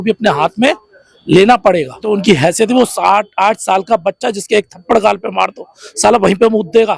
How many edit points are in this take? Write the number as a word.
one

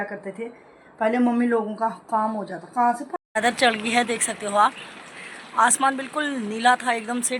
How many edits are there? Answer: one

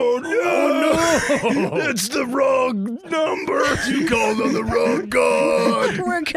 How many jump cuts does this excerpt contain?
zero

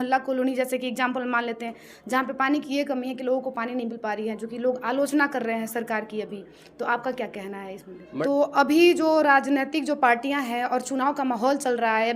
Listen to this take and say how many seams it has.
one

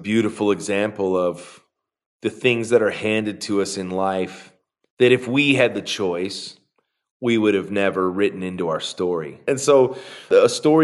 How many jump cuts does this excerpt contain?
one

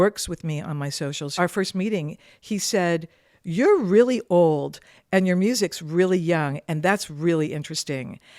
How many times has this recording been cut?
one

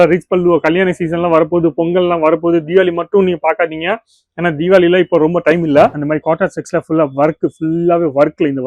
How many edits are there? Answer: one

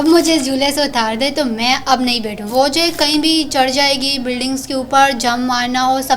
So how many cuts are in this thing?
one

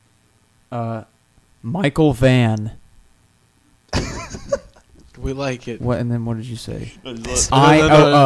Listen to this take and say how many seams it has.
zero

